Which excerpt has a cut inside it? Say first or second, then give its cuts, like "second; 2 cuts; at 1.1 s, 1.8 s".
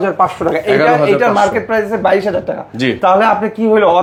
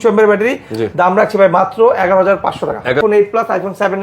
second; 1 cut; at 3.0 s